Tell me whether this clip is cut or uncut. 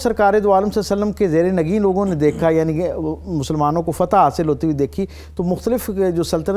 uncut